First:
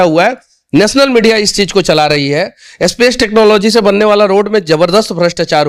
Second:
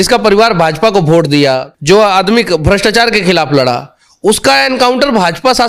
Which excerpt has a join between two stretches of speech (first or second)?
second